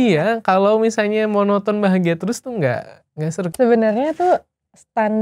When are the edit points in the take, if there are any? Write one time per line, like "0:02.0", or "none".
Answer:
0:03.5